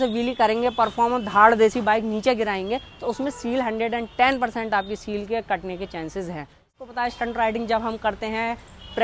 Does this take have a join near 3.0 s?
no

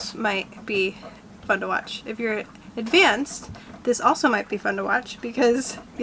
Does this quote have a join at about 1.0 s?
no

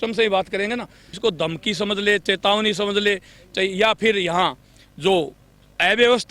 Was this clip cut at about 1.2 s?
yes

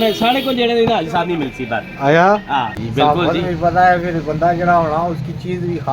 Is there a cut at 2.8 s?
yes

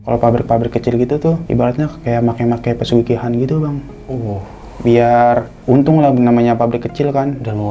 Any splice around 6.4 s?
no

